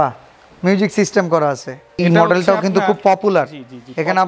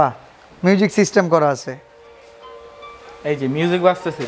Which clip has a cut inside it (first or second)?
first